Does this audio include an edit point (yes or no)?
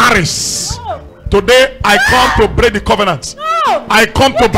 no